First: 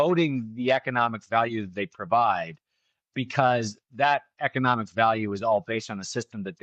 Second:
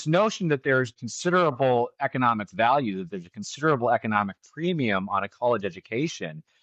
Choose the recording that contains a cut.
second; 1 cut; at 1.1 s

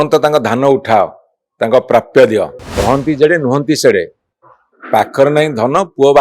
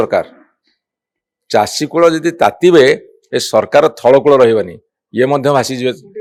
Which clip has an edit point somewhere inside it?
first; 1 cut; at 2.6 s

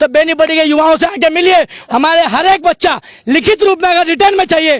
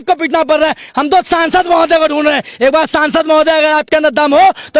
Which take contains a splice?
first; 1 cut; at 1.8 s

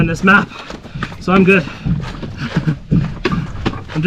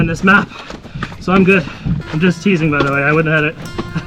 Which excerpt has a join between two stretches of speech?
second; 1 cut; at 2.0 s

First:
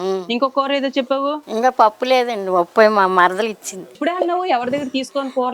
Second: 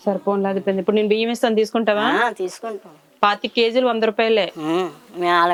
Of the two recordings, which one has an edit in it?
first; 1 cut; at 4.0 s

